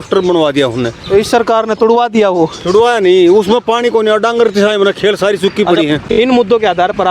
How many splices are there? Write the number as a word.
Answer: one